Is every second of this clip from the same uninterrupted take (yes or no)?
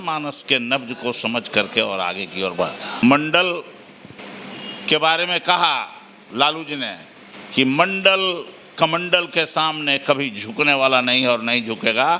no